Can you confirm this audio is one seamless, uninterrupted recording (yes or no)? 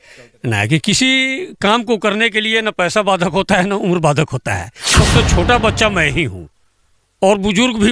no